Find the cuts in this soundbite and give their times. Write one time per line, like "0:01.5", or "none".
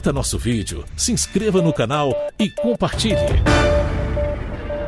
0:03.0